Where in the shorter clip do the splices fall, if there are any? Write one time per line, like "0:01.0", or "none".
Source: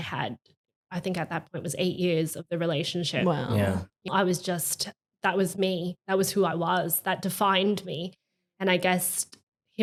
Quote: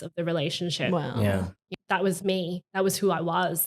0:01.6